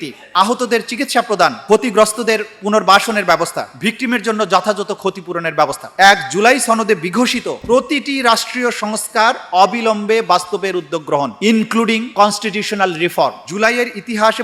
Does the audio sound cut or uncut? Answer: cut